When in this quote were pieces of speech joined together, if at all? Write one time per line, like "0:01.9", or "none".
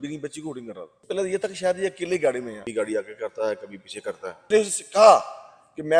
0:01.0
0:02.6
0:04.5